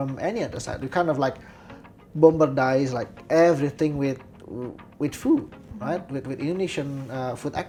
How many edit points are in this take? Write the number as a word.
zero